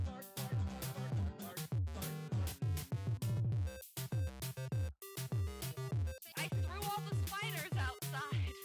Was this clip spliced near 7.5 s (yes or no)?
no